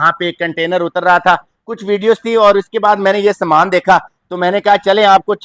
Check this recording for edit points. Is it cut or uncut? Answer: uncut